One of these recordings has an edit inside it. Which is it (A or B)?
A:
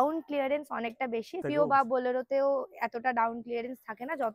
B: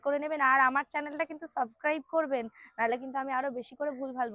A